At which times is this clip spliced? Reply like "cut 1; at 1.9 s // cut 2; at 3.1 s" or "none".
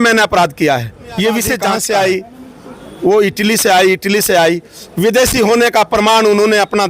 cut 1; at 1.6 s